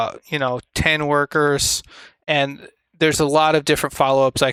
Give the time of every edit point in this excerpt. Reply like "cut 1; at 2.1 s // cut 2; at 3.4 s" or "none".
none